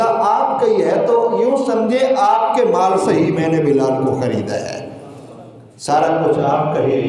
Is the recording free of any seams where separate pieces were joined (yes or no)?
yes